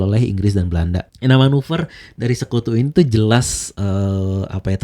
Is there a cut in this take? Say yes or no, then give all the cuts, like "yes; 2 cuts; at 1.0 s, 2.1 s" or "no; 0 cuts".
no; 0 cuts